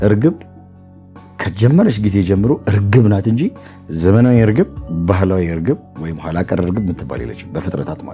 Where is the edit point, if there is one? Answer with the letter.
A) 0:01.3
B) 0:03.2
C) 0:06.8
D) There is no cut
D